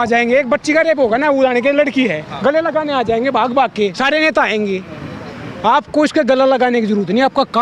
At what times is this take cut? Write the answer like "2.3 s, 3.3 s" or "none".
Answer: none

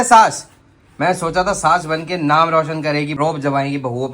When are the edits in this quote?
3.1 s

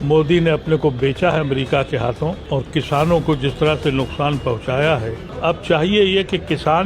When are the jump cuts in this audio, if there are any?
2.4 s, 5.3 s

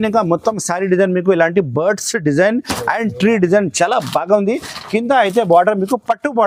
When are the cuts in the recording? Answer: none

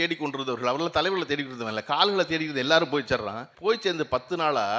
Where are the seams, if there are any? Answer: 3.4 s

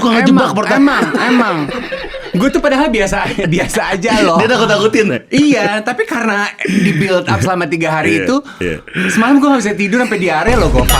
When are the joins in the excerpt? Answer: none

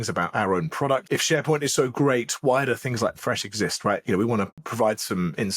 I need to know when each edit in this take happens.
1.0 s, 4.5 s

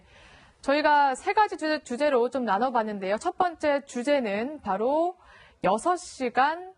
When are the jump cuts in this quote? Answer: none

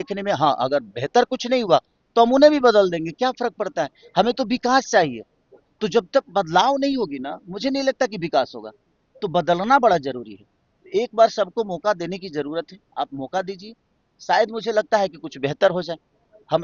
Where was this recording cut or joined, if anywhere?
none

